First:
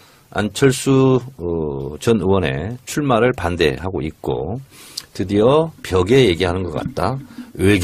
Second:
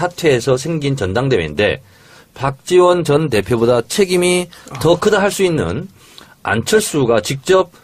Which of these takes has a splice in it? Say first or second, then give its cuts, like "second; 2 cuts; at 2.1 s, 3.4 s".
second; 1 cut; at 6.3 s